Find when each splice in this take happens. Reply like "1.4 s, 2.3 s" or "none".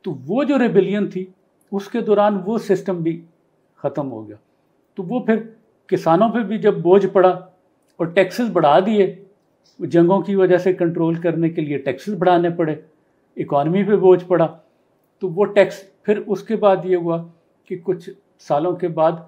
none